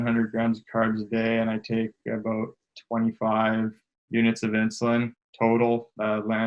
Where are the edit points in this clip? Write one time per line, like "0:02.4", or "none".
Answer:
none